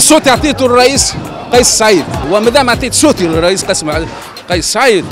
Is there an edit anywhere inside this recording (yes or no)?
yes